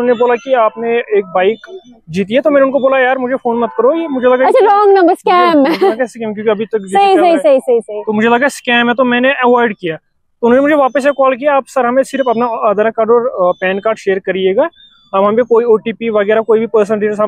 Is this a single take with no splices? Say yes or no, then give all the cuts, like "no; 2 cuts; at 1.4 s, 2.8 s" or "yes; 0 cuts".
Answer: yes; 0 cuts